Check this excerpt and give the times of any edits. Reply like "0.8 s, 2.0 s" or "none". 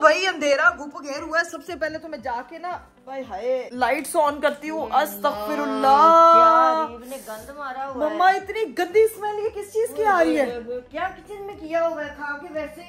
none